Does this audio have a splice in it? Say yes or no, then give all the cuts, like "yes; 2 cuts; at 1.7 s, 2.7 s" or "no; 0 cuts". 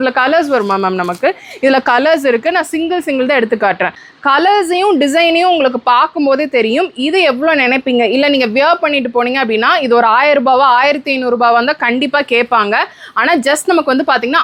no; 0 cuts